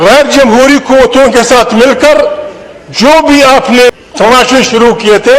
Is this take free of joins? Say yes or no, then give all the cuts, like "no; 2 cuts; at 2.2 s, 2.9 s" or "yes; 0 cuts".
no; 1 cut; at 3.9 s